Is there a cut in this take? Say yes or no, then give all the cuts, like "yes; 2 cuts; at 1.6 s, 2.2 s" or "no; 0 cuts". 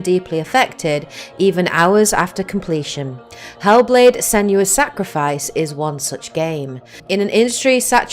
yes; 1 cut; at 1.2 s